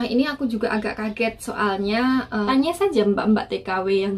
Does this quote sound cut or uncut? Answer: cut